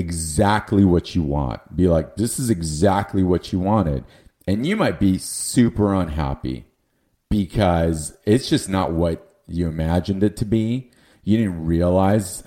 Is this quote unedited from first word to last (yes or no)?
yes